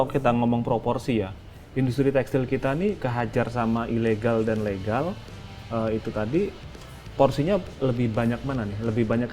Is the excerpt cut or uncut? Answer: uncut